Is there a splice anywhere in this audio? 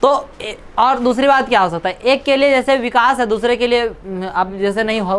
no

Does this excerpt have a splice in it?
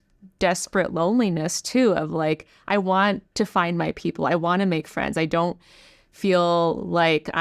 no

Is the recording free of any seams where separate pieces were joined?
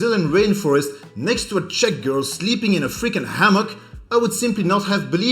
yes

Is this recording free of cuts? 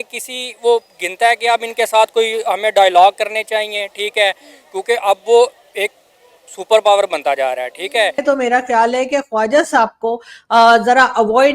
no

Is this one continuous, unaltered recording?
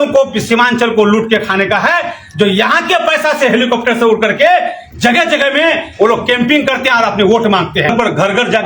yes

